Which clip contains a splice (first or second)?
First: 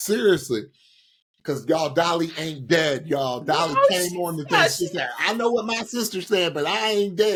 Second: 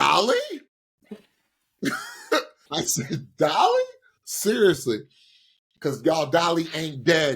second